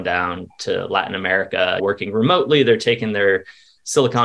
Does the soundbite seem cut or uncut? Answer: cut